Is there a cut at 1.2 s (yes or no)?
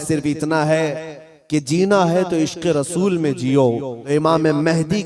no